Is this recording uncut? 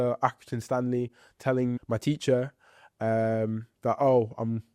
no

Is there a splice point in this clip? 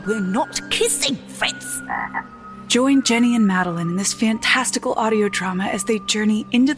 no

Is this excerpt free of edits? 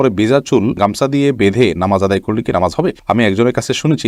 yes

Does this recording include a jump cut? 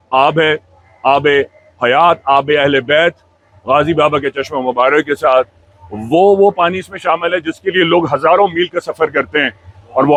no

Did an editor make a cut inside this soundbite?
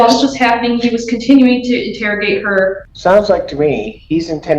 yes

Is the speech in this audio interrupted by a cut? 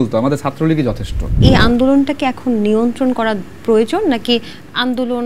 yes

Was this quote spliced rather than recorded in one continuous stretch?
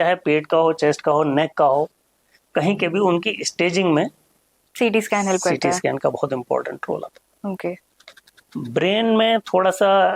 no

